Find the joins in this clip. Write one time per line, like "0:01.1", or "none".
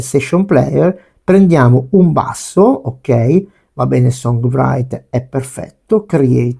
none